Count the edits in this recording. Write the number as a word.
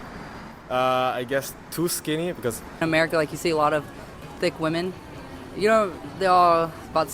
one